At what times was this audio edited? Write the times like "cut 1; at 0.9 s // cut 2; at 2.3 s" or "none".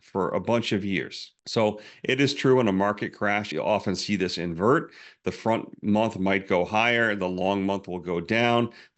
cut 1; at 3.5 s